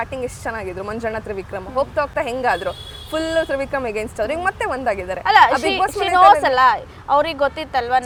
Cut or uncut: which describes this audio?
uncut